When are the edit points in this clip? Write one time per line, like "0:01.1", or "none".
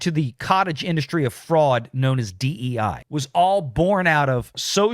none